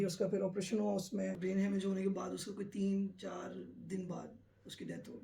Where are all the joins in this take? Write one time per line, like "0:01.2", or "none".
0:01.4